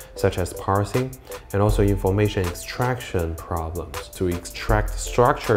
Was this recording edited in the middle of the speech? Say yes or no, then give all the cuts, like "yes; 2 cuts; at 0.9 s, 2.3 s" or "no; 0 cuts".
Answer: yes; 1 cut; at 4.1 s